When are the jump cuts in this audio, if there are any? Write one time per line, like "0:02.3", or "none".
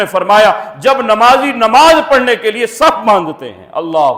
none

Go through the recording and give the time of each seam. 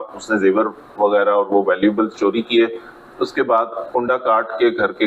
none

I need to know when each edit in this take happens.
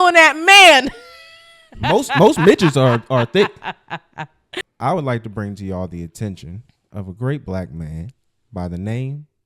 0:04.6

